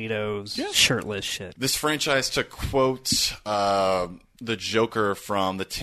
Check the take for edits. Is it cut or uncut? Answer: cut